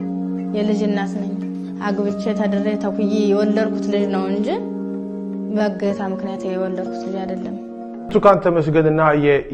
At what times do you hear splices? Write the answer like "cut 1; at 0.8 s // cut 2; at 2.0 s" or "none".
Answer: cut 1; at 8.0 s